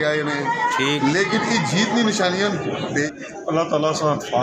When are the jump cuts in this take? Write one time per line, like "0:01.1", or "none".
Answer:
0:02.9

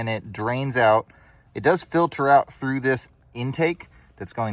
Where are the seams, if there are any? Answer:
0:03.1

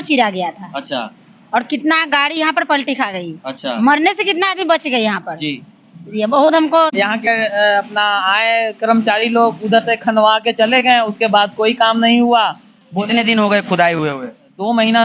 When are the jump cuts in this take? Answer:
0:06.9

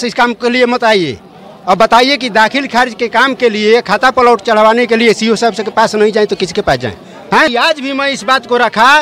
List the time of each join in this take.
0:07.5

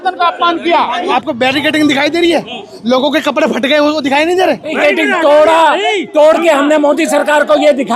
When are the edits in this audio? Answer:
0:01.0
0:04.8

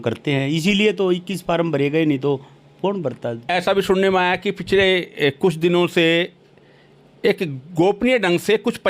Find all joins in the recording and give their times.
0:03.4

